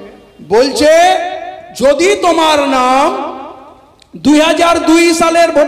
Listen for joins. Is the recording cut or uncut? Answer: uncut